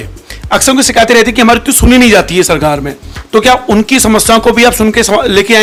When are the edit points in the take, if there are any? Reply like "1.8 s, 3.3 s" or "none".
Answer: none